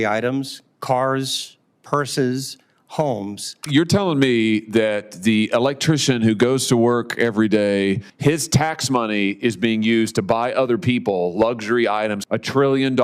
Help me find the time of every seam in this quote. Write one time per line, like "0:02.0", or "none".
0:03.6
0:08.1
0:12.2